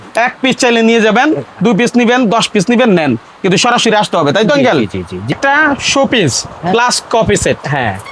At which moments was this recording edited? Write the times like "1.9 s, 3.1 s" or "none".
5.3 s

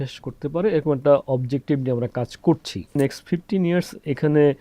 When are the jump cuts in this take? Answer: 3.0 s

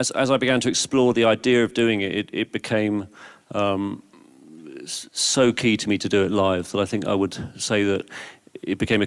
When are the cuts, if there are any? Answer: 1.4 s

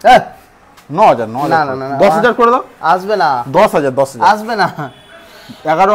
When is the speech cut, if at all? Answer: none

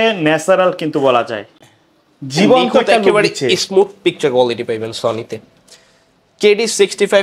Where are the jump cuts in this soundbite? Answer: none

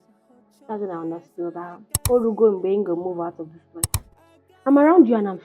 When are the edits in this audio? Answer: 1.9 s, 4.0 s

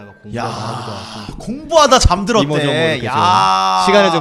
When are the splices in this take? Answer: none

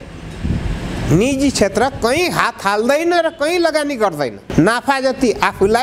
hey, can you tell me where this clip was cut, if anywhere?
4.4 s

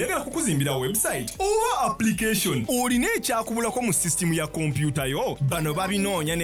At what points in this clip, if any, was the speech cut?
none

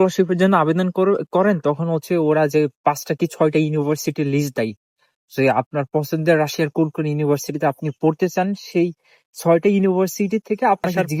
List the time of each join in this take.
none

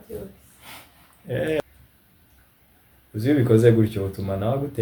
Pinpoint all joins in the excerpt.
1.6 s

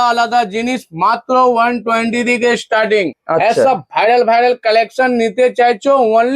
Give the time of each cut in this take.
3.2 s

